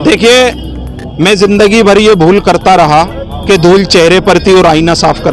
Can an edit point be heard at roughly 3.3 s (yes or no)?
yes